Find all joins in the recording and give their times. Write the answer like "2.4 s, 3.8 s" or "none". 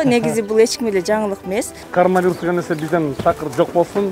1.8 s